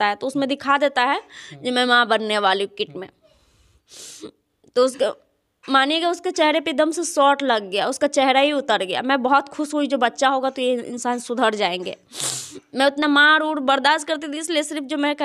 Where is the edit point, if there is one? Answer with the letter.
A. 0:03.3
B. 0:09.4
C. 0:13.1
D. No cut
D